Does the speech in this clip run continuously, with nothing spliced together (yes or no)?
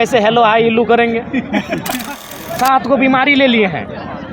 no